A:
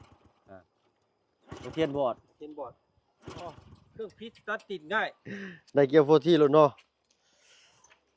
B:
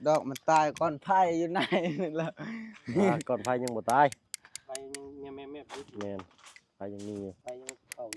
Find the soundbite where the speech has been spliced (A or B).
A